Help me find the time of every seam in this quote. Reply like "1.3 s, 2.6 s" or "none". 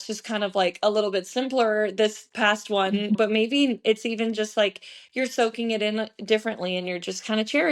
3.2 s